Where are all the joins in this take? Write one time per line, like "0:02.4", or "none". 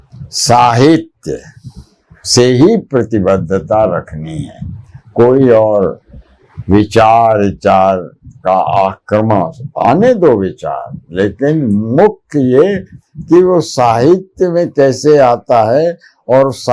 none